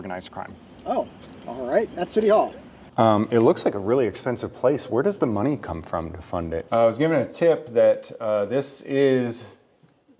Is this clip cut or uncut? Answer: cut